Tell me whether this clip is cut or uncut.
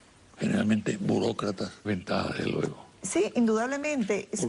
uncut